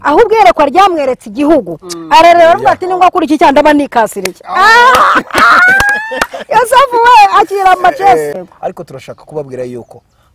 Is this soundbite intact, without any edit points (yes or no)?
no